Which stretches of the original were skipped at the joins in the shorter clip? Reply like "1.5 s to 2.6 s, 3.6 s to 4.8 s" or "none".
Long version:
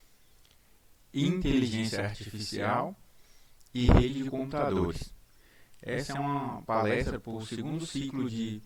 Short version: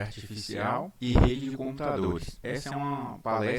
3.0 s to 3.7 s, 5.1 s to 5.8 s